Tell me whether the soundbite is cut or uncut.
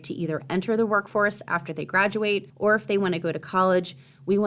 cut